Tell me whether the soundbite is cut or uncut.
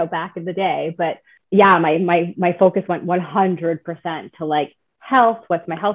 cut